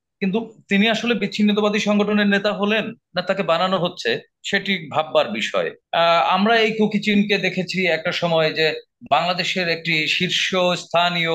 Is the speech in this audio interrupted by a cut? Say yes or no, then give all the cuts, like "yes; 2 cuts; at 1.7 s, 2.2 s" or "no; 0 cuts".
yes; 1 cut; at 5.8 s